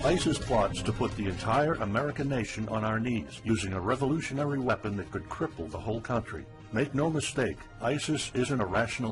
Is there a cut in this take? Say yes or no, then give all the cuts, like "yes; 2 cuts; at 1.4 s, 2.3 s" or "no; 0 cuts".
no; 0 cuts